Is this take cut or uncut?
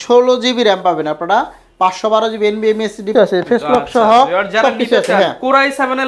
cut